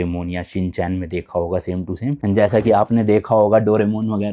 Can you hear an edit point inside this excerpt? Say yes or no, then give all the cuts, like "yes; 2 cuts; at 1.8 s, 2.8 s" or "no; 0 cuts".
yes; 1 cut; at 2.2 s